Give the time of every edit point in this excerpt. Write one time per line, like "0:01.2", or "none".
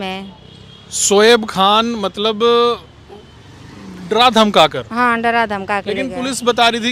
none